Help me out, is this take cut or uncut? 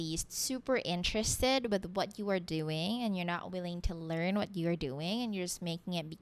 uncut